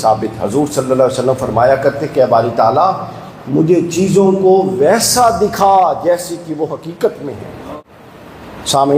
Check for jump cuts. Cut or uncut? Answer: cut